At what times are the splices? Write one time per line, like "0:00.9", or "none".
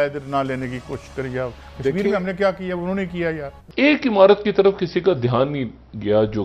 0:03.5